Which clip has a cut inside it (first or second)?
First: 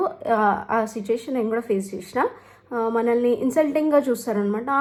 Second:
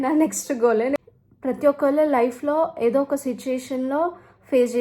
second